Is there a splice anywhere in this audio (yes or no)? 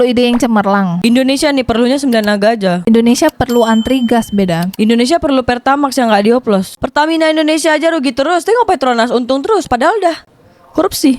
yes